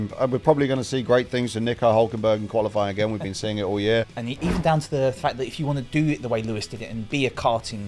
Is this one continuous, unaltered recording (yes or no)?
no